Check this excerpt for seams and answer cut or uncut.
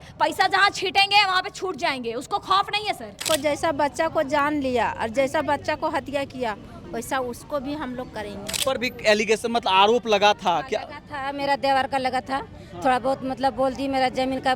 cut